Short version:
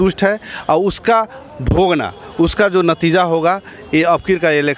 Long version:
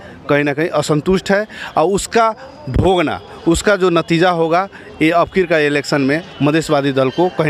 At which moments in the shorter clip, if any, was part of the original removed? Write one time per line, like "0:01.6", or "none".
none